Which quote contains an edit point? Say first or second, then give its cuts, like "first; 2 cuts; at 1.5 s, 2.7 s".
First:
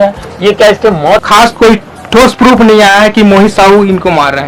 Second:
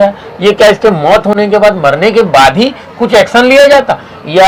first; 1 cut; at 1.2 s